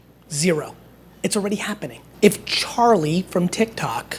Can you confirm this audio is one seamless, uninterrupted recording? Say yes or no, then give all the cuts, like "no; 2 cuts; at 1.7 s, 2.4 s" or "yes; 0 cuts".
no; 1 cut; at 2.0 s